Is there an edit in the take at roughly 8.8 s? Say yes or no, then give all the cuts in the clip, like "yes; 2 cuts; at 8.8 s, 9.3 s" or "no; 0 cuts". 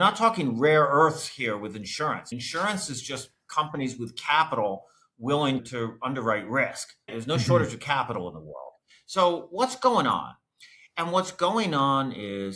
no; 1 cut; at 7.1 s